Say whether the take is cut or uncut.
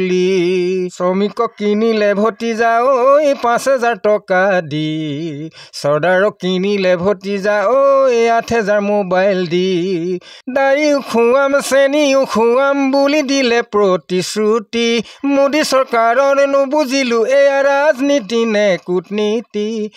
cut